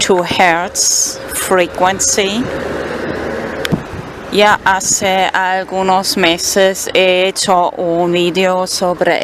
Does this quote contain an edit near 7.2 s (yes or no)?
yes